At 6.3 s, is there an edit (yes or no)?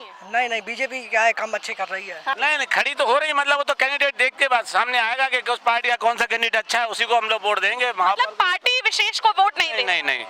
no